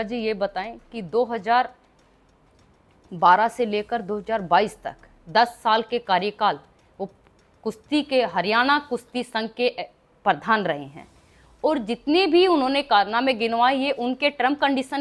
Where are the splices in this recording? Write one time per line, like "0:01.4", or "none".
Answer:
none